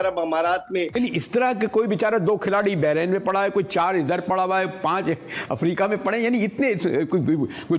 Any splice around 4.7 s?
no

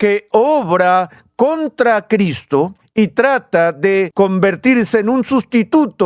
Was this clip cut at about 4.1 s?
yes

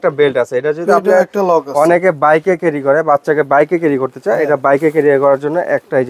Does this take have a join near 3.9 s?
no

